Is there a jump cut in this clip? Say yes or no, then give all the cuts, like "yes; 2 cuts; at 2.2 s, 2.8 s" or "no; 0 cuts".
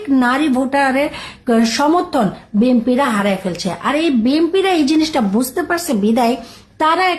no; 0 cuts